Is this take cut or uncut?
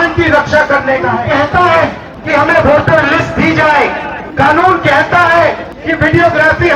cut